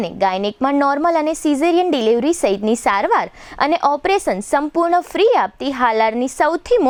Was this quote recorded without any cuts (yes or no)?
yes